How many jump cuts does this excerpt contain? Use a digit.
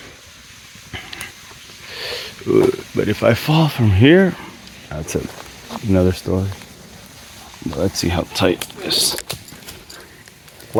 0